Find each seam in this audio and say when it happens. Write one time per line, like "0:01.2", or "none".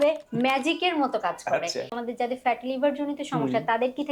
0:02.0

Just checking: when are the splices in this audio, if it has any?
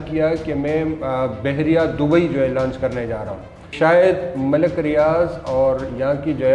0:03.7

